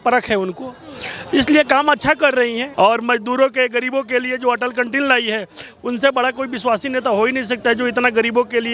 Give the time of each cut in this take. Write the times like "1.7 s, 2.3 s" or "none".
2.6 s